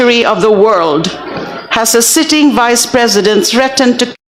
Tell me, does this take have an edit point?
no; 0 cuts

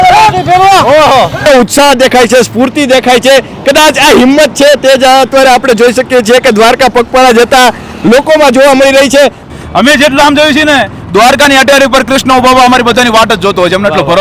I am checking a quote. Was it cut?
yes; 2 cuts; at 1.4 s, 9.4 s

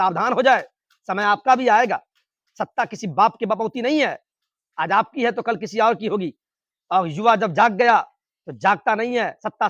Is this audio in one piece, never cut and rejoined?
yes; 0 cuts

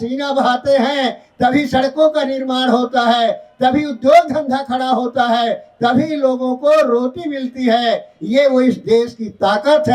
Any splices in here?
no; 0 cuts

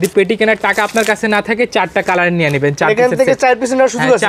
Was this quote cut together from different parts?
no; 0 cuts

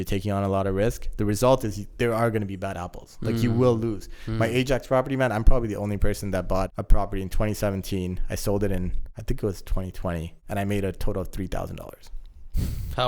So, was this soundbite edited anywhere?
yes; 3 cuts; at 6.8 s, 9.1 s, 10.3 s

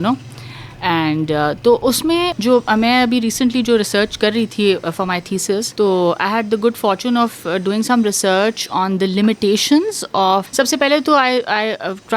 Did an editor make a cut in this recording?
yes; 3 cuts; at 2.3 s, 5.7 s, 10.5 s

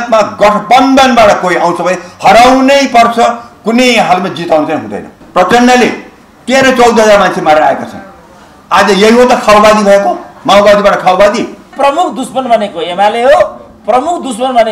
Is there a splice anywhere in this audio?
yes; 2 cuts; at 5.2 s, 11.7 s

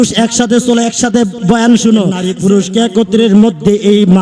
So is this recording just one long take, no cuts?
no; 1 cut; at 2.3 s

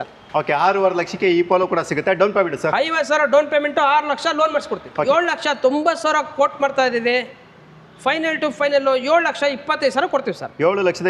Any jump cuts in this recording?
yes; 1 cut; at 5.0 s

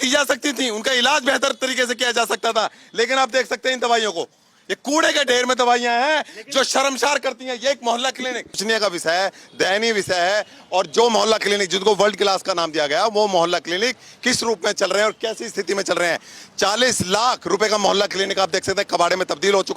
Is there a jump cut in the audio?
yes; 1 cut; at 8.6 s

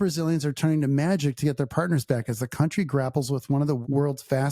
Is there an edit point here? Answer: no; 0 cuts

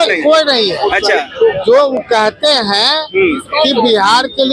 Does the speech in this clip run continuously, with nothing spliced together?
yes; 0 cuts

